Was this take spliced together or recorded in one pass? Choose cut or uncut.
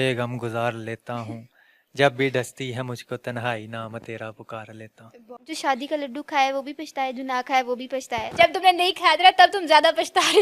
cut